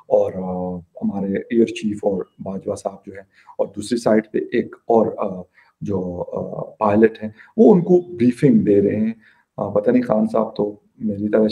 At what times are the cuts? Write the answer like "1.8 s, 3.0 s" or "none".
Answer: none